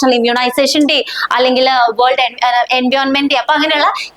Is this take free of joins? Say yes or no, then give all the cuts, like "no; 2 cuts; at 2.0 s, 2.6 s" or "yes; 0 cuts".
yes; 0 cuts